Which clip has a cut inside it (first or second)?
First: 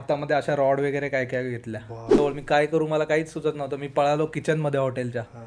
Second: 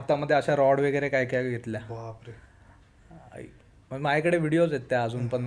first